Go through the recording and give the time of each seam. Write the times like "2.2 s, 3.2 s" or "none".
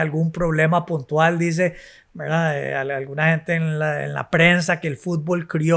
none